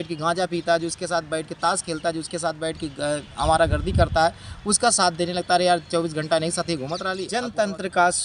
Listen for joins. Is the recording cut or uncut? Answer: cut